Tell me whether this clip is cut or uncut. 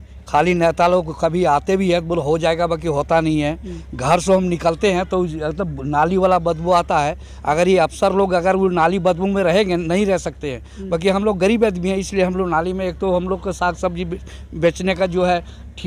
uncut